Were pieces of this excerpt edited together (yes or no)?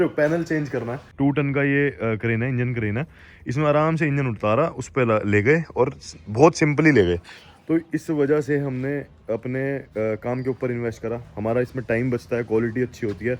yes